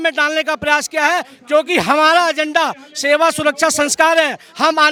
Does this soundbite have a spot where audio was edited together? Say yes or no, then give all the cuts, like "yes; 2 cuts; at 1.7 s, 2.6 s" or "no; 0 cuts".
no; 0 cuts